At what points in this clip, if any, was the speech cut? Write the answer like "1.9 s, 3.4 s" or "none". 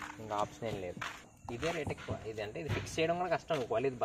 1.3 s